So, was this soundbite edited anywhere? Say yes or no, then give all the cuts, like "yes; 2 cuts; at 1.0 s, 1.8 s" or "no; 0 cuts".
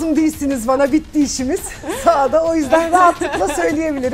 no; 0 cuts